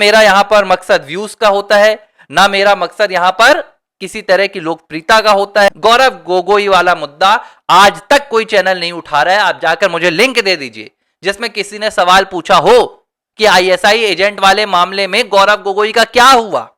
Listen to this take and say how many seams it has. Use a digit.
1